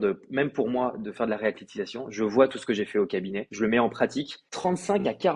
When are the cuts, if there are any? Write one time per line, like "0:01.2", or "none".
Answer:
0:03.4
0:04.4